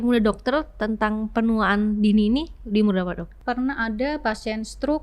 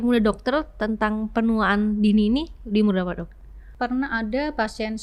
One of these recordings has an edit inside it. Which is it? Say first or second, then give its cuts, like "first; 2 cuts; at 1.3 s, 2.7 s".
first; 1 cut; at 3.3 s